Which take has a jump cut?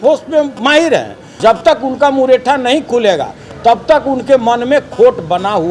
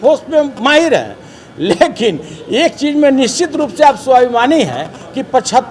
first; 1 cut; at 1.2 s

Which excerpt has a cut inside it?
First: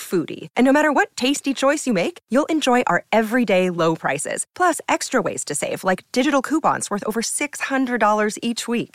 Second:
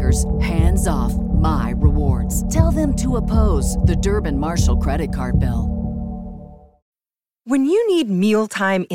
second; 1 cut; at 7.0 s

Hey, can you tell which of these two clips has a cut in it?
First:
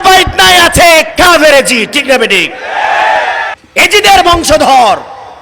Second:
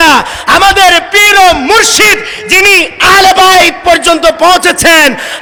first; 1 cut; at 3.6 s

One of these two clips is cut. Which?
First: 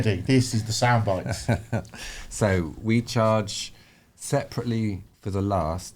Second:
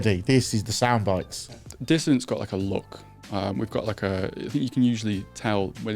second; 1 cut; at 1.5 s

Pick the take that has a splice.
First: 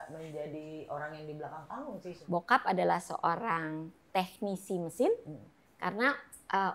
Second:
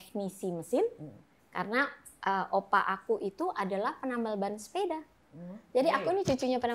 first; 1 cut; at 2.1 s

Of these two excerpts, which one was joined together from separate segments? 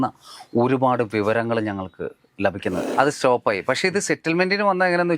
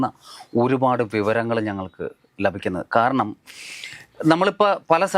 first; 1 cut; at 2.8 s

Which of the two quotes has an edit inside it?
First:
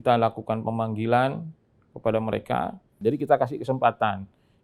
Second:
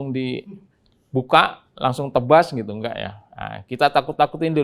first; 1 cut; at 3.0 s

